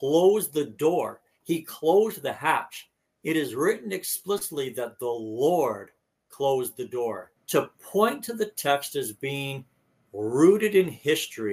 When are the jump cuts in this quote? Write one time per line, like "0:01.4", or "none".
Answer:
0:07.3

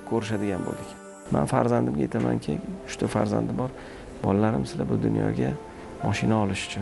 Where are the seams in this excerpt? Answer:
0:01.0

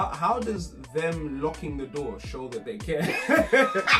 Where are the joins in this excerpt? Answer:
none

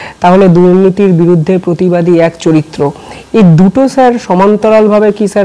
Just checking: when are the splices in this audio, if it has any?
none

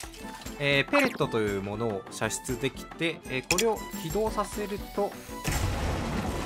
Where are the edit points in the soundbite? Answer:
0:05.3

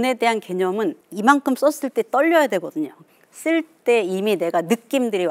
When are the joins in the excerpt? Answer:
0:01.1
0:03.0

